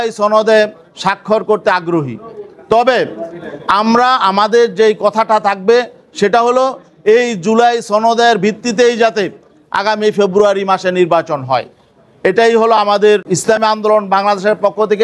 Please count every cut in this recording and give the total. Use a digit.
1